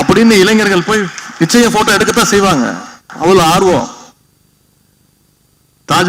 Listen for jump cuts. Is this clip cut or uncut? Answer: uncut